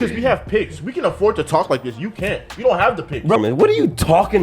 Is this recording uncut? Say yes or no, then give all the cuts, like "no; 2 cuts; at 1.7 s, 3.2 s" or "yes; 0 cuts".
no; 1 cut; at 3.4 s